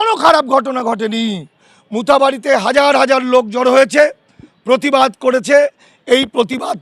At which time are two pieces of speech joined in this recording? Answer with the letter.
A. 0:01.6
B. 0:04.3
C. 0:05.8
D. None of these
D